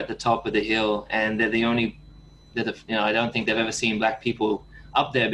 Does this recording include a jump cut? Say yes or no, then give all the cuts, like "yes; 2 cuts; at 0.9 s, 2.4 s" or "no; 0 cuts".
no; 0 cuts